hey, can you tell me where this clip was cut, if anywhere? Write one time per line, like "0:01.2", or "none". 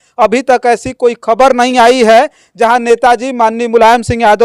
none